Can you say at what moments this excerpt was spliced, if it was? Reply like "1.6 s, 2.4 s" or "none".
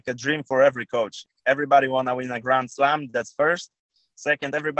1.3 s

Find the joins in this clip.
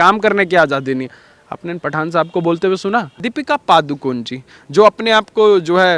3.2 s

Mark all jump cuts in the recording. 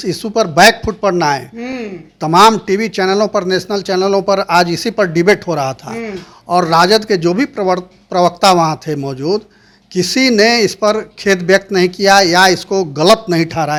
none

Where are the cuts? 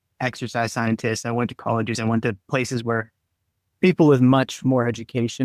none

